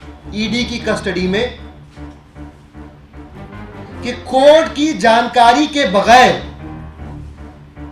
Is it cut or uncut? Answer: cut